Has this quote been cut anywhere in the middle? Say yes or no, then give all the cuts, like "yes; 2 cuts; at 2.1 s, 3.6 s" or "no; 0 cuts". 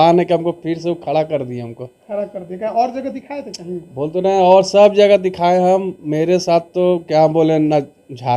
no; 0 cuts